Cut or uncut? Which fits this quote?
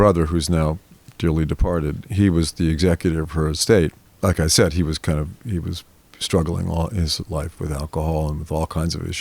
cut